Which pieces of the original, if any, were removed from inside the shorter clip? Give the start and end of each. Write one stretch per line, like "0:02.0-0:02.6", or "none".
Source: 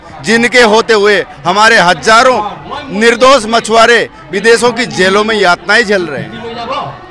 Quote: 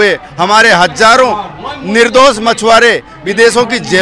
none